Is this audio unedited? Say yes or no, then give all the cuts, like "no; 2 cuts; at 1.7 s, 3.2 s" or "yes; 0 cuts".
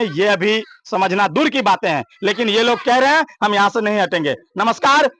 yes; 0 cuts